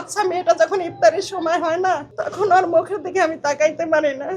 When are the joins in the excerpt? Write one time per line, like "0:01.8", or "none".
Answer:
0:02.2